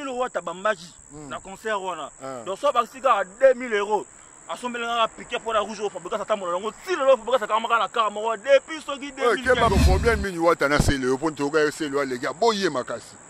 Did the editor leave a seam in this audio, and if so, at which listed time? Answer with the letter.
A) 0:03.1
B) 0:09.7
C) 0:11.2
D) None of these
B